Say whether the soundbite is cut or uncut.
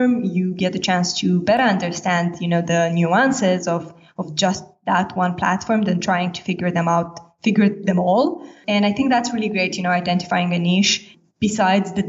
cut